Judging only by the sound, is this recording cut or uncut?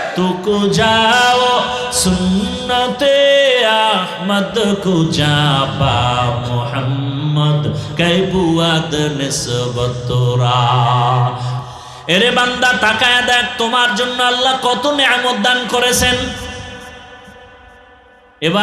cut